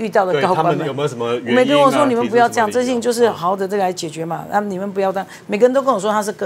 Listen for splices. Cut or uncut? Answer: uncut